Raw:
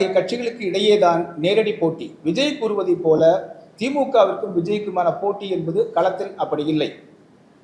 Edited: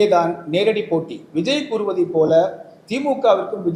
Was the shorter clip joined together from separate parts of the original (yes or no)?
no